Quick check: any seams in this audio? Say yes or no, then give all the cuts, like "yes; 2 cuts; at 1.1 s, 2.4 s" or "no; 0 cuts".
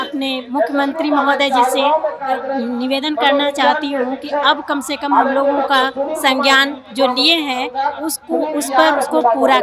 no; 0 cuts